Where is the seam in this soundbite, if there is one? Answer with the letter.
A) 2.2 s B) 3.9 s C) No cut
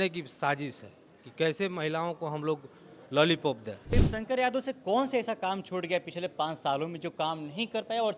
B